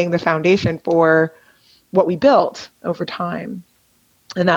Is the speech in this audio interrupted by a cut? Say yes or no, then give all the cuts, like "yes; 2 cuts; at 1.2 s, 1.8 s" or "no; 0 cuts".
no; 0 cuts